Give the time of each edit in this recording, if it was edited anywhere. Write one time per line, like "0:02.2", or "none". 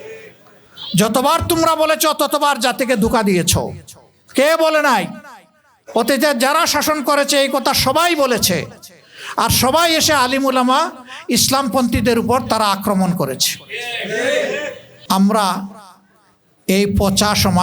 0:14.9